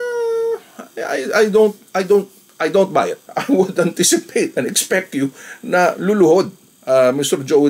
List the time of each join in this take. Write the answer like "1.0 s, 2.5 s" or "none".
3.2 s